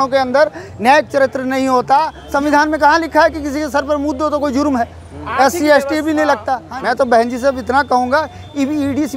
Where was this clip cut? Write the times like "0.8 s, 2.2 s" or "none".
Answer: 2.2 s, 6.7 s